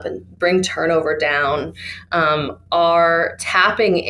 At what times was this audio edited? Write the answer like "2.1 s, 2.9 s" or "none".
none